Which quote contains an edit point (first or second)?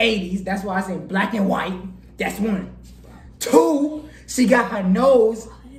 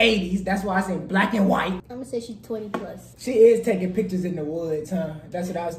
second